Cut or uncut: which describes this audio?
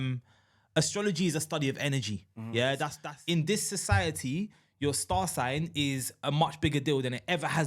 cut